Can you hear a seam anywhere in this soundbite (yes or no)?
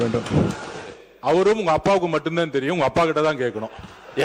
yes